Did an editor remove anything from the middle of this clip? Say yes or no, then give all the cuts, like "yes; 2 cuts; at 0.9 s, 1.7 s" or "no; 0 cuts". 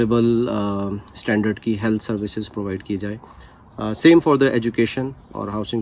no; 0 cuts